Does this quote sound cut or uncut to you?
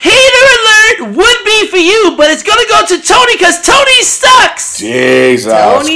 uncut